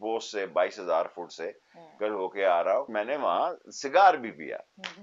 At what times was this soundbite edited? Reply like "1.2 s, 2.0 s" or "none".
2.9 s